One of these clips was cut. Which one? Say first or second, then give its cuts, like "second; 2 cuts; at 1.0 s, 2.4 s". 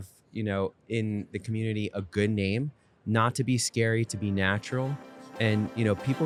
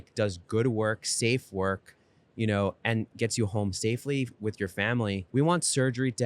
second; 1 cut; at 5.2 s